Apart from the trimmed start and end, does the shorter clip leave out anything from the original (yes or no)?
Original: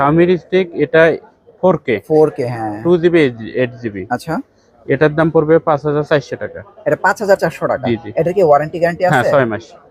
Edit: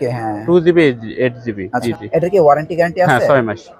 yes